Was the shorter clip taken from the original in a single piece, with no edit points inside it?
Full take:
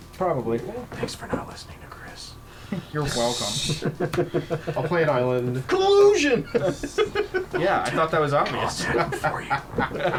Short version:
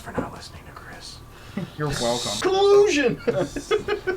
no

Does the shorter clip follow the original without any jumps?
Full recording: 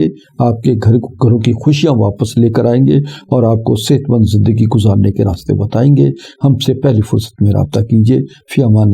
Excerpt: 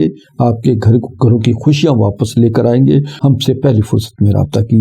no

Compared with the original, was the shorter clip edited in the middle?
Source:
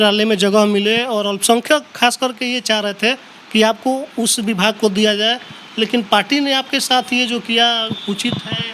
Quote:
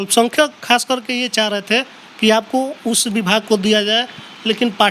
no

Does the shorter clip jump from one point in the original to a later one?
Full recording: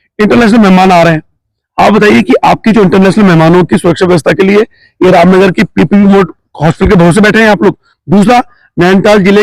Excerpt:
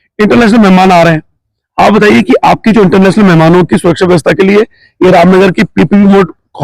no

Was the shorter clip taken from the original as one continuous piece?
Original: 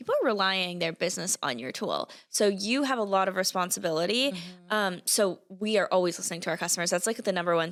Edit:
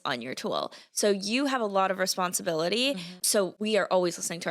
no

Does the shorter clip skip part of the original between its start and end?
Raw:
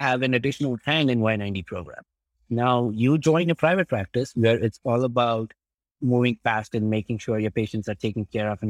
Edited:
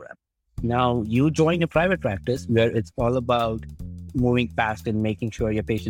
no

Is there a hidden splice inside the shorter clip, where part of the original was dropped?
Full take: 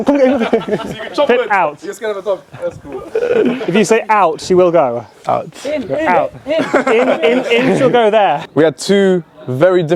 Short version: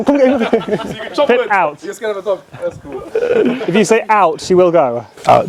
no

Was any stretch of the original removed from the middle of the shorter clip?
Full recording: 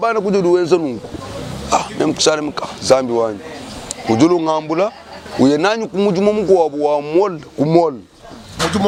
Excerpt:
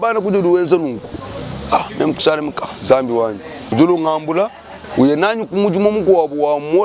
yes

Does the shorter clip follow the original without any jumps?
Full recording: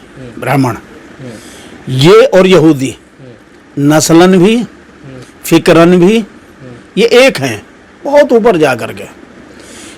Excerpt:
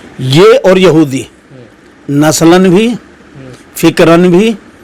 yes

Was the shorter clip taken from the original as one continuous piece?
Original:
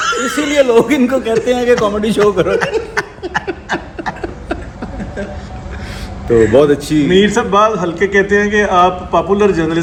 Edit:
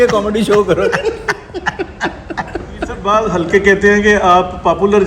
no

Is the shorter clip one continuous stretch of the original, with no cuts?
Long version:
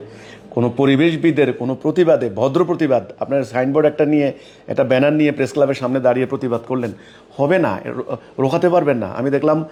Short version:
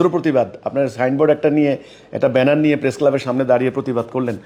yes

